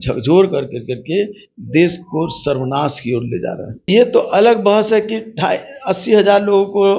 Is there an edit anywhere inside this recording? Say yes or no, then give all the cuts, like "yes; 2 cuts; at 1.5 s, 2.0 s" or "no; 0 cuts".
yes; 1 cut; at 3.9 s